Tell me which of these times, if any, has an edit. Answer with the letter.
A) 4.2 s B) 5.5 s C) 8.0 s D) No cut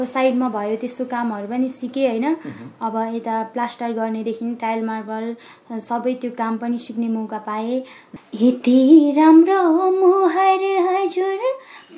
C